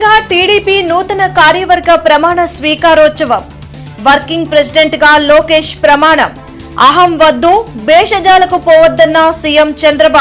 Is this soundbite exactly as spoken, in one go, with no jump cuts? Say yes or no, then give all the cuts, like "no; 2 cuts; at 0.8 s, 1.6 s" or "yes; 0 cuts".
yes; 0 cuts